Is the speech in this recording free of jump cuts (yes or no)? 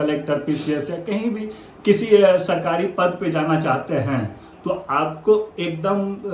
yes